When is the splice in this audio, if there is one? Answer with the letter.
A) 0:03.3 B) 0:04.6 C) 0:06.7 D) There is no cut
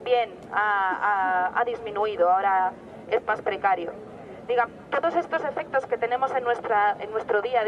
A